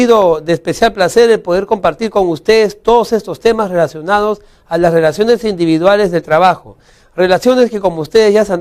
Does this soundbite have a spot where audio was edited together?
no; 0 cuts

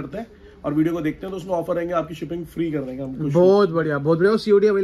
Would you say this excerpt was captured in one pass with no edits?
yes; 0 cuts

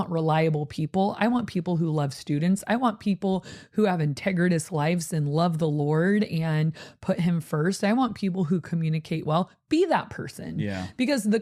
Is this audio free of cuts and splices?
yes; 0 cuts

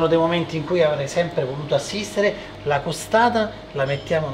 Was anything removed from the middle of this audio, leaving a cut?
yes; 1 cut; at 2.5 s

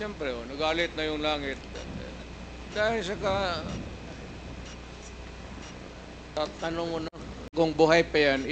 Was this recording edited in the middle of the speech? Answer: yes; 1 cut; at 7.4 s

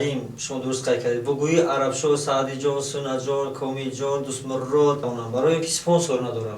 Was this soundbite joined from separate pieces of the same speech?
yes; 1 cut; at 5.1 s

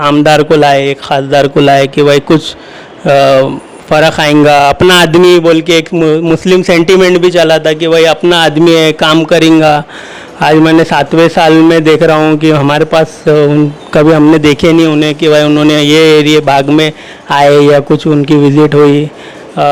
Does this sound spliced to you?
no; 0 cuts

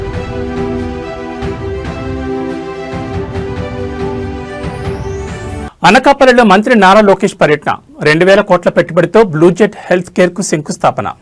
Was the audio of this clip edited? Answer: no; 0 cuts

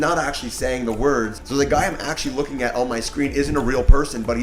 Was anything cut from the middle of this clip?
yes; 1 cut; at 1.4 s

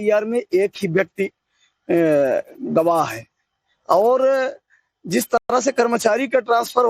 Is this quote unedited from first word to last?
yes; 0 cuts

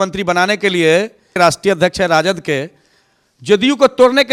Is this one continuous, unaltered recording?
yes; 0 cuts

